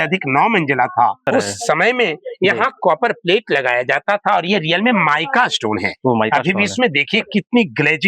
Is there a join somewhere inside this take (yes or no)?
yes